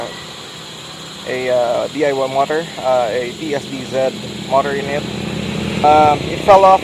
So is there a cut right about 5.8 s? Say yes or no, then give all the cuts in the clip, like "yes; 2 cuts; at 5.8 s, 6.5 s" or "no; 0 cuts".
yes; 1 cut; at 5.8 s